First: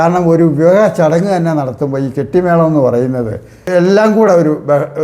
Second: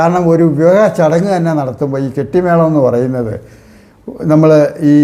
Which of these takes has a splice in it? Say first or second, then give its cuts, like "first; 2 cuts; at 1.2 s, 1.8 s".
first; 1 cut; at 3.7 s